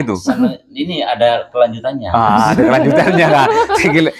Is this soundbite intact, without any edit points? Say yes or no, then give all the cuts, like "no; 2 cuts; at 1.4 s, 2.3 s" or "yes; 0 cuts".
yes; 0 cuts